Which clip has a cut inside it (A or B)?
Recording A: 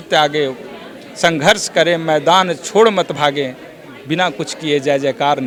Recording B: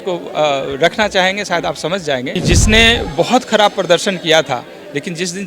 B